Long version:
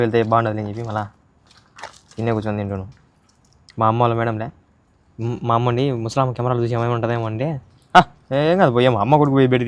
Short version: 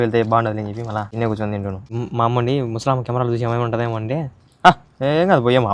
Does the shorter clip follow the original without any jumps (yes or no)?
no